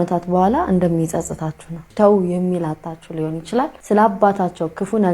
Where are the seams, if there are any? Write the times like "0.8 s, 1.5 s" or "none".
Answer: 1.9 s, 3.8 s